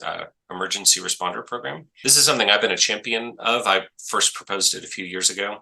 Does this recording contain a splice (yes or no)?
yes